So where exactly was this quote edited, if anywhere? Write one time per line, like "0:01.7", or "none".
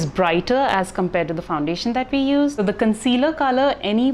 0:02.6